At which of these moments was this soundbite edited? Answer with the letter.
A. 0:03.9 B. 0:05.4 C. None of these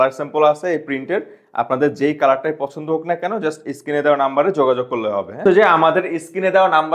B